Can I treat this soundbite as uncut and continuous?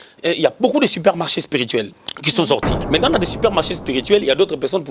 no; 1 cut; at 2.7 s

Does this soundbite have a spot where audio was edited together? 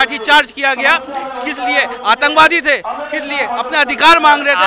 no; 0 cuts

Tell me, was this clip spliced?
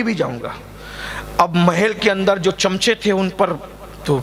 no; 0 cuts

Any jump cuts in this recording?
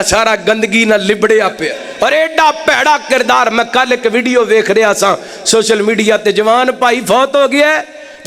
yes; 1 cut; at 1.8 s

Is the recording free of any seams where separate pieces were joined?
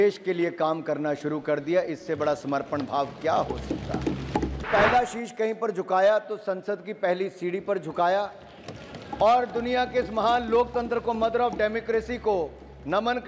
no; 1 cut; at 4.7 s

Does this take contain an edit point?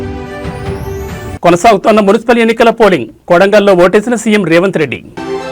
yes; 1 cut; at 1.0 s

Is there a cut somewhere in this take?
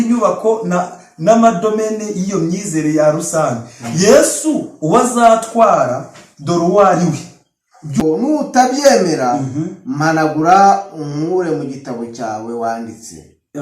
yes; 1 cut; at 8.0 s

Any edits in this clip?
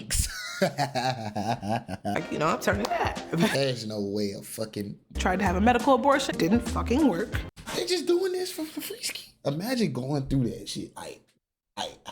yes; 3 cuts; at 2.1 s, 5.1 s, 6.3 s

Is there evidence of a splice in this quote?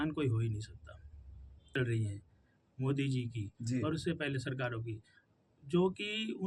yes; 1 cut; at 1.8 s

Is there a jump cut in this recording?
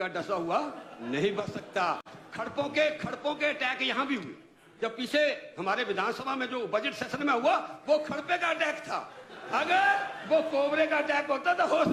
no; 0 cuts

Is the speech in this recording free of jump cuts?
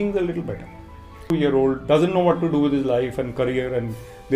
no; 1 cut; at 1.3 s

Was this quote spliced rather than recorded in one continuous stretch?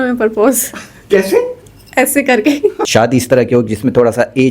yes; 1 cut; at 2.8 s

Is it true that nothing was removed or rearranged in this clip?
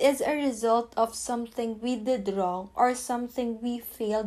yes; 0 cuts

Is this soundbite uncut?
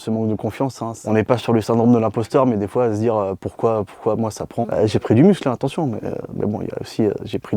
no; 2 cuts; at 1.0 s, 4.6 s

